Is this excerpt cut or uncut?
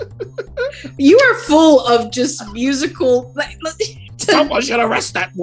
cut